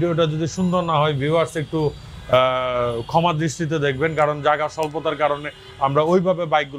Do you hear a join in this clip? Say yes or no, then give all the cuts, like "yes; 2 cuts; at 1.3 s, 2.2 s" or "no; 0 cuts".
no; 0 cuts